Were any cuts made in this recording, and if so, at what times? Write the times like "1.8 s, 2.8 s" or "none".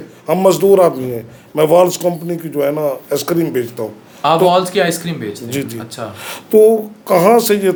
none